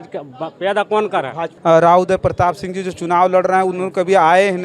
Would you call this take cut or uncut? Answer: cut